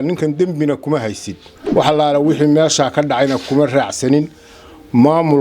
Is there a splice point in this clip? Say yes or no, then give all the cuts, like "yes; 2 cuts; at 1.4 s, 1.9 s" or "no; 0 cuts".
yes; 1 cut; at 1.6 s